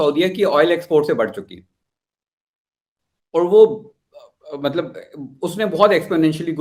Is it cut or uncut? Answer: uncut